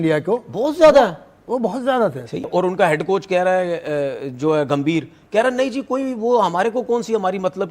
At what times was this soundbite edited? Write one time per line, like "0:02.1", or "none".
0:02.5